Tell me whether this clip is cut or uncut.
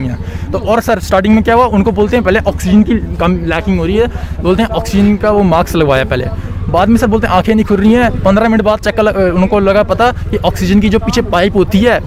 uncut